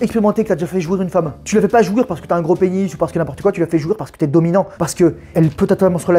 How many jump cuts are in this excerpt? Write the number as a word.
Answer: two